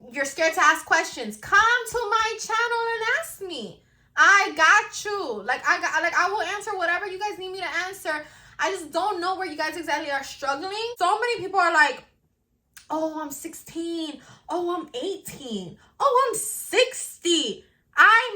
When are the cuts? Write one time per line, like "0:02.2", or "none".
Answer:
0:10.9